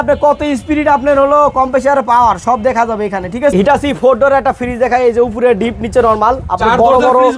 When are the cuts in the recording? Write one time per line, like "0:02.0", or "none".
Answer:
0:03.5